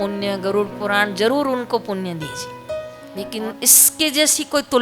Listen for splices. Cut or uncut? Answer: cut